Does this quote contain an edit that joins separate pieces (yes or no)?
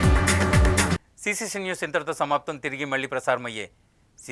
no